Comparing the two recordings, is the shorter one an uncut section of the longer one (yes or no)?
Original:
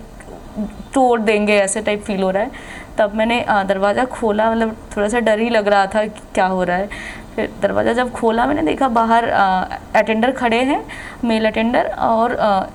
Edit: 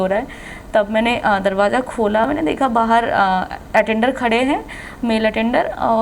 no